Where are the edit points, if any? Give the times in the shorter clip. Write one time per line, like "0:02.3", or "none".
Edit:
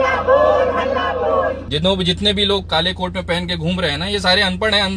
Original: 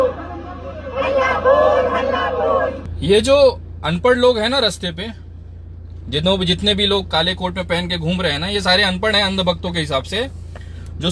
0:01.7